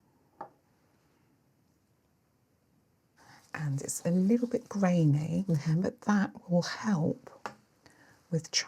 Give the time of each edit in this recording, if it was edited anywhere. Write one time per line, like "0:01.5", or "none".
0:03.2